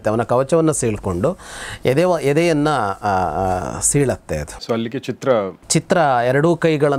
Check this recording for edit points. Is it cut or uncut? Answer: uncut